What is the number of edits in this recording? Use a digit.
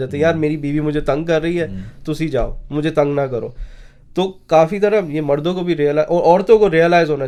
0